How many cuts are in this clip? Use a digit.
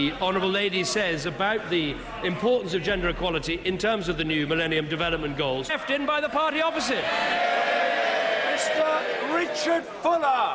0